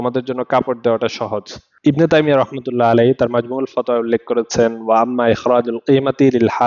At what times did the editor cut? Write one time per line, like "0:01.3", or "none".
0:01.7